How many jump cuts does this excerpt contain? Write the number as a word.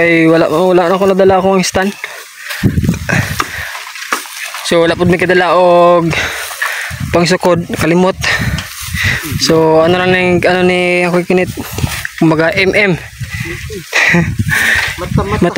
zero